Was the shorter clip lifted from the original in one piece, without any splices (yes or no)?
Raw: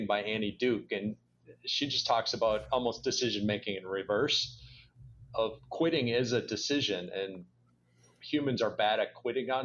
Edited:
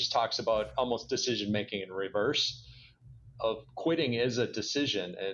yes